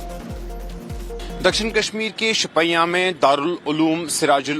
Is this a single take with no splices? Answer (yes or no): no